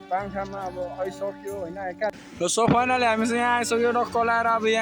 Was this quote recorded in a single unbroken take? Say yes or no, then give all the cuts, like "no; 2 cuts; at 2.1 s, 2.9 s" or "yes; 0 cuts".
no; 1 cut; at 2.1 s